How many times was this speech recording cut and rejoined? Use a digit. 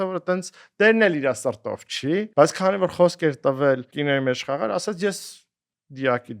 2